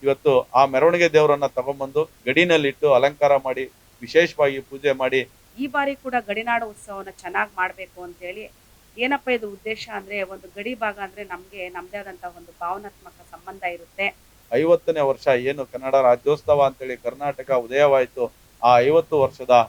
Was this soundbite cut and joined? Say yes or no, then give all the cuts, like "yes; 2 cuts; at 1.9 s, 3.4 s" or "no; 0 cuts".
yes; 2 cuts; at 5.4 s, 14.3 s